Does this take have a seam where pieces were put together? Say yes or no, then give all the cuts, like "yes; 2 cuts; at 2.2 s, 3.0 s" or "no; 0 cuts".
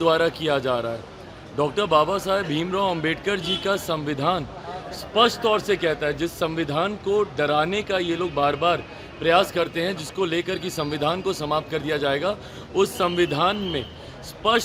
no; 0 cuts